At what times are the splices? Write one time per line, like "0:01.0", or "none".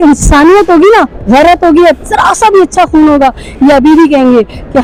none